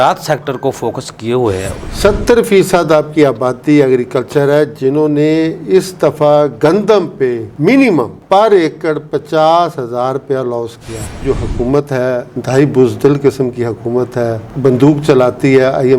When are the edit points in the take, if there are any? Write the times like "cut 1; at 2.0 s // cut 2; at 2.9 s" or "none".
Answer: cut 1; at 1.9 s // cut 2; at 8.2 s // cut 3; at 11.2 s